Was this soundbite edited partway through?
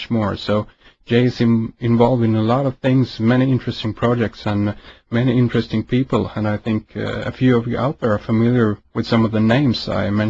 no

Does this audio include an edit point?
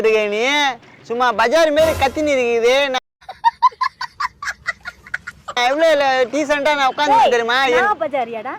no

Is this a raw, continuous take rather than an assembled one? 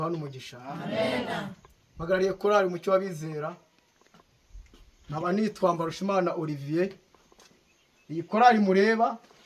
yes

